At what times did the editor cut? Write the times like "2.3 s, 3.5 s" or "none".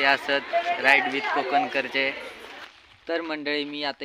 2.7 s